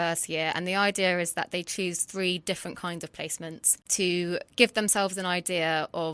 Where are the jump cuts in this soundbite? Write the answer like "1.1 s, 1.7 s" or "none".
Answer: 3.8 s